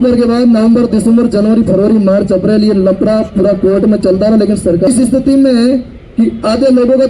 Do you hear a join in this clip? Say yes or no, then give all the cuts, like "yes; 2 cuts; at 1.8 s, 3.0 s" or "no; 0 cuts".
yes; 1 cut; at 4.9 s